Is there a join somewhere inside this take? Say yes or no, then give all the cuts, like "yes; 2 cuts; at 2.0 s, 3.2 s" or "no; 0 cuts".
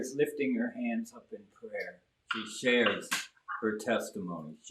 yes; 1 cut; at 2.4 s